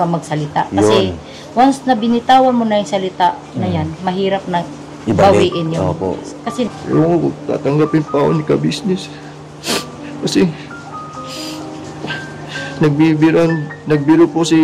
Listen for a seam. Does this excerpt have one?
yes; 1 cut; at 6.7 s

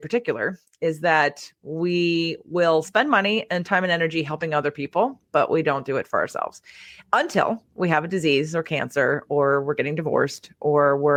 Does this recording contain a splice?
no; 0 cuts

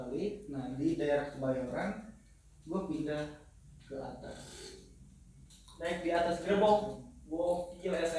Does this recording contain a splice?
no; 0 cuts

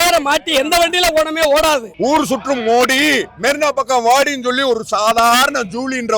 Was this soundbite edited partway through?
yes; 1 cut; at 1.9 s

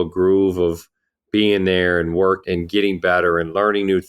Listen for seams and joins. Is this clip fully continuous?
no; 1 cut; at 2.4 s

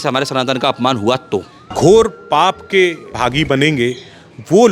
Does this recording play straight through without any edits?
no; 2 cuts; at 1.6 s, 3.1 s

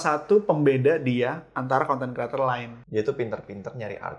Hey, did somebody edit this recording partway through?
yes; 1 cut; at 2.7 s

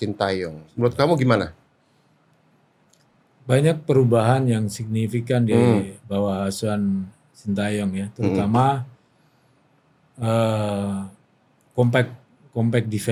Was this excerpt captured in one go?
yes; 0 cuts

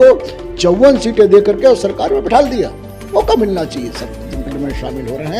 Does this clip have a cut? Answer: yes; 1 cut; at 4.5 s

